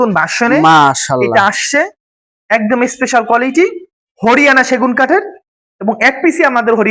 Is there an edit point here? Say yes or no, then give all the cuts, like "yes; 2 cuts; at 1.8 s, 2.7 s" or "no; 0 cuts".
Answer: no; 0 cuts